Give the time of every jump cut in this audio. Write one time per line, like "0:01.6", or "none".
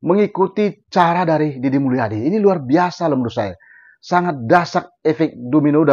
none